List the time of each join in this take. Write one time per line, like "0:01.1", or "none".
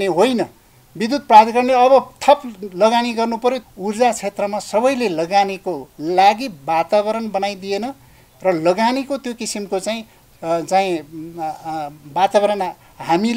0:03.7